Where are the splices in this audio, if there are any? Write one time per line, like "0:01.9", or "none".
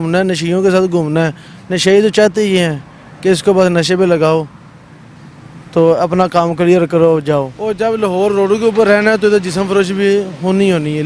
0:07.6